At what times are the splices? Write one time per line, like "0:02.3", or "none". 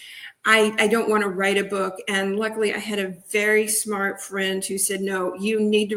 none